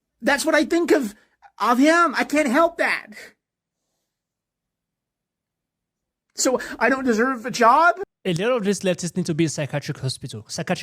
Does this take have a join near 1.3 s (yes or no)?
no